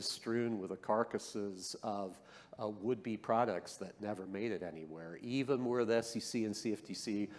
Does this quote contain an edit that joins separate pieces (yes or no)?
no